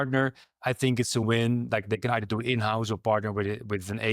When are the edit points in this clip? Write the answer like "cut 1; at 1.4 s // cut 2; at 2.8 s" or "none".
cut 1; at 1.2 s